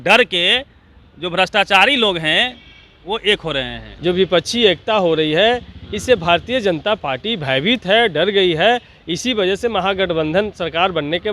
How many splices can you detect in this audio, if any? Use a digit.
1